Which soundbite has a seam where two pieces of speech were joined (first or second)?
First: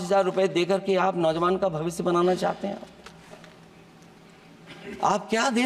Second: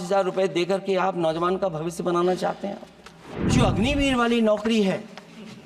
second